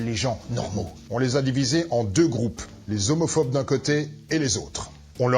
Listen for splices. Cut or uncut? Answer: cut